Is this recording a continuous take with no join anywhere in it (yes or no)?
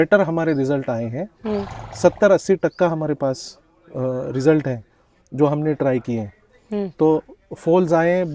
yes